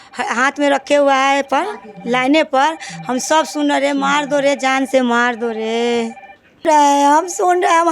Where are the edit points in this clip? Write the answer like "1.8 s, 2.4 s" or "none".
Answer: 6.6 s

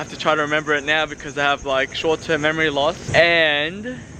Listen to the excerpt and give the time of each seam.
3.0 s

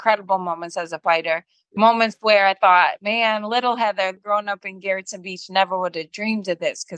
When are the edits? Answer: 1.6 s, 4.2 s

